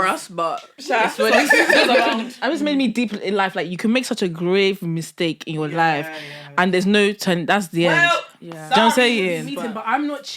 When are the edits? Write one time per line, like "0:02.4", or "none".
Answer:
0:02.3
0:09.4

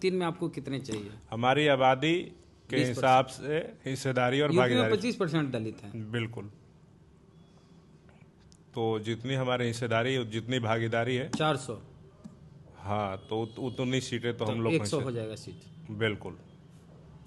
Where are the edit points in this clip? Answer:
none

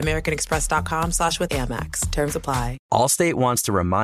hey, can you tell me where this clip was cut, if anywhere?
0:02.8

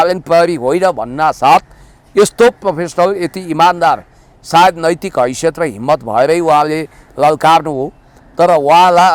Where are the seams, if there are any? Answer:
none

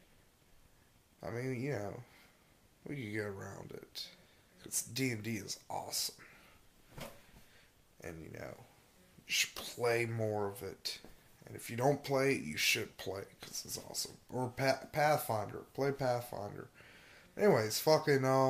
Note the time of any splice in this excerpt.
0:02.8

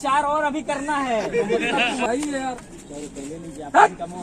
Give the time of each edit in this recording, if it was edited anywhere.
0:02.1

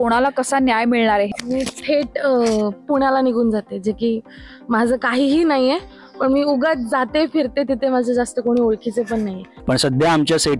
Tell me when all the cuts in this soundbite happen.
0:01.3
0:09.5

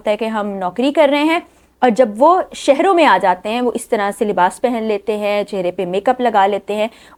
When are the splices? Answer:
none

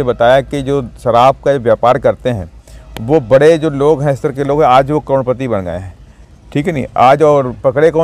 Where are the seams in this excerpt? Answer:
none

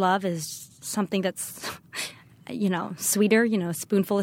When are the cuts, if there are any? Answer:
none

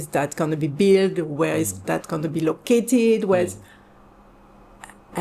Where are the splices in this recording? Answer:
none

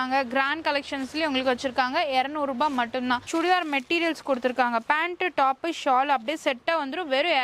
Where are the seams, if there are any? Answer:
0:03.2

